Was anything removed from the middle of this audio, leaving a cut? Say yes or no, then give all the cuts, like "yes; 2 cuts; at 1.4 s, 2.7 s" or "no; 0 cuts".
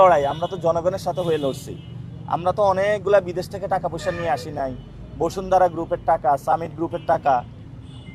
no; 0 cuts